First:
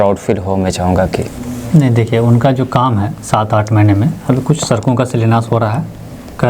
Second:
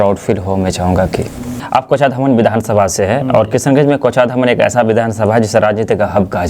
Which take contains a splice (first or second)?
second